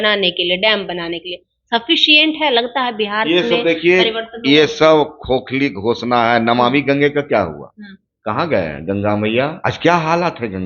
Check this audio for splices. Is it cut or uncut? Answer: cut